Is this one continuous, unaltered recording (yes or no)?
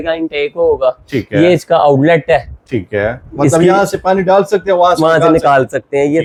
yes